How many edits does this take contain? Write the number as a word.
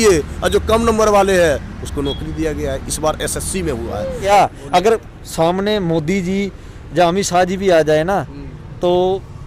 one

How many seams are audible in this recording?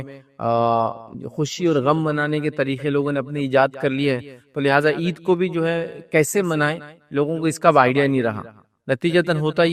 zero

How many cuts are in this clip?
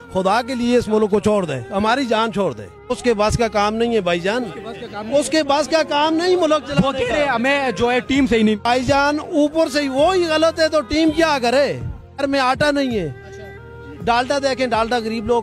three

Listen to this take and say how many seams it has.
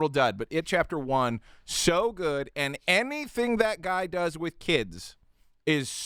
zero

